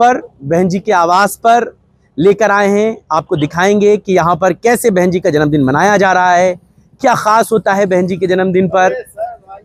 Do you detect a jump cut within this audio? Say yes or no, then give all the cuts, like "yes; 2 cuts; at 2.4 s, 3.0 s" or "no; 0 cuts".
no; 0 cuts